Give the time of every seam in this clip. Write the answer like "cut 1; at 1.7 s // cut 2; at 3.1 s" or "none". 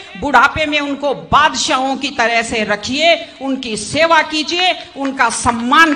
none